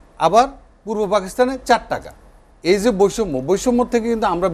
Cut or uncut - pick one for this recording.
uncut